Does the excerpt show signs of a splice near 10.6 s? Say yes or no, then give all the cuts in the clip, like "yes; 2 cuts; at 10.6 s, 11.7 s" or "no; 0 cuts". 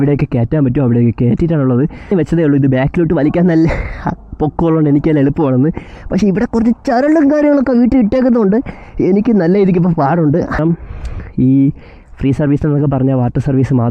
yes; 2 cuts; at 2.0 s, 10.6 s